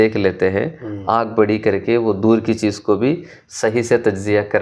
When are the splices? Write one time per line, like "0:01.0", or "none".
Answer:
none